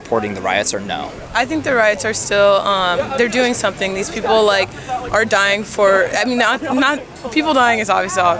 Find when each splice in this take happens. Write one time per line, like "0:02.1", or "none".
none